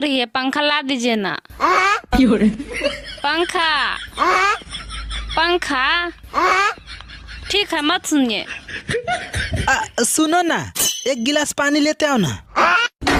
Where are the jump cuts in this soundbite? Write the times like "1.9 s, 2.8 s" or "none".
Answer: none